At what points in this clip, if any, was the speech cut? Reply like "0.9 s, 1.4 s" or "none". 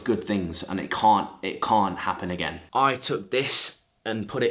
2.6 s